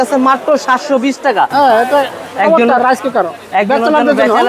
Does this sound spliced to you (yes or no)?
no